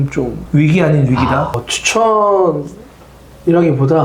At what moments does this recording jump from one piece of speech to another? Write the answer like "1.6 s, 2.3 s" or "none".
1.6 s